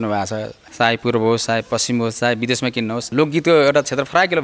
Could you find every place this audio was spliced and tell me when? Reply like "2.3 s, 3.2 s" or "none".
3.1 s

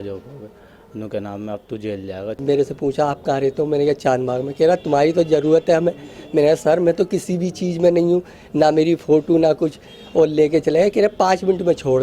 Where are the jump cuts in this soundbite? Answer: 2.4 s

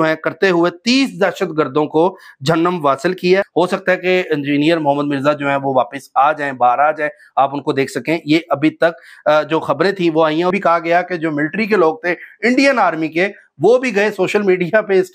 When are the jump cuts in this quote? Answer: 3.5 s, 10.5 s

